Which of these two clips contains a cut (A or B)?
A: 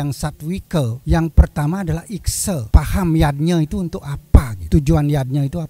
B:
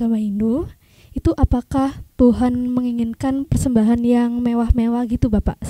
A